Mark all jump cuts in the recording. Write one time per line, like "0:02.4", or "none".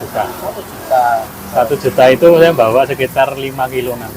0:01.3